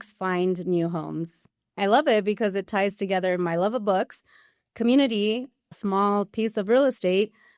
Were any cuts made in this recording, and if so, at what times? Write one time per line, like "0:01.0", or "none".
0:01.8